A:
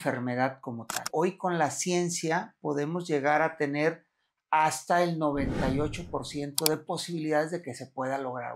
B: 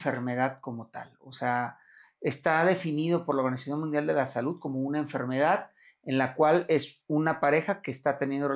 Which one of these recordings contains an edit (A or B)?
A